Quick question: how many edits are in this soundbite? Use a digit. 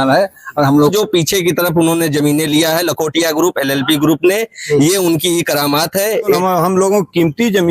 2